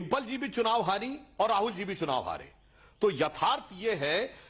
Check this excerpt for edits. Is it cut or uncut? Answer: uncut